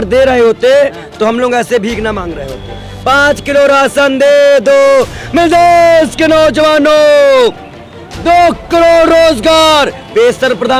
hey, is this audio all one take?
yes; 0 cuts

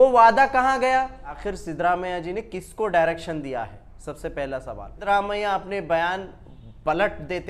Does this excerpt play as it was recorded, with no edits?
no; 2 cuts; at 1.5 s, 5.0 s

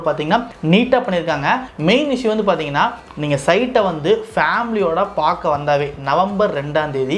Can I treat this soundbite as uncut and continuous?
yes; 0 cuts

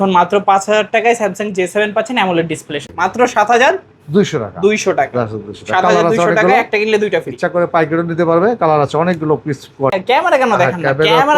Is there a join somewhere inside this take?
yes; 2 cuts; at 2.8 s, 10.0 s

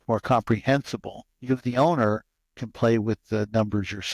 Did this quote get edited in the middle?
yes; 1 cut; at 1.3 s

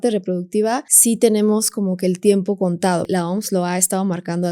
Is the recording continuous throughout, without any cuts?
no; 2 cuts; at 0.9 s, 3.0 s

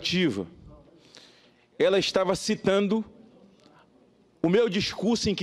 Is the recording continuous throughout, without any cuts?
yes; 0 cuts

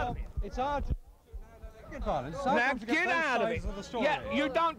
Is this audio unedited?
yes; 0 cuts

